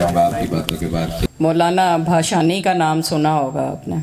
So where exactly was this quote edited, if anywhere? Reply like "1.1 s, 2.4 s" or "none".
1.2 s